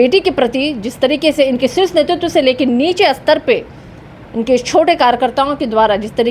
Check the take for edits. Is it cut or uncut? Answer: uncut